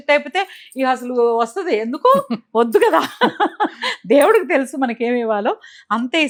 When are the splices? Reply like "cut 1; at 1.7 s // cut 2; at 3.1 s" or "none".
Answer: none